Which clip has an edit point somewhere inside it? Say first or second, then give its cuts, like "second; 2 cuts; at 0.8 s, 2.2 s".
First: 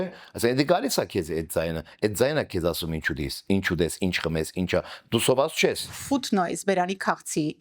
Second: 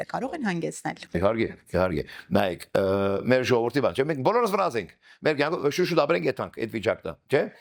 first; 1 cut; at 6.0 s